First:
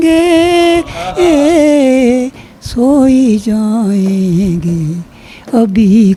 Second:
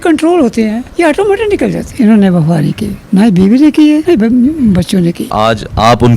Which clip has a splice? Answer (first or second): second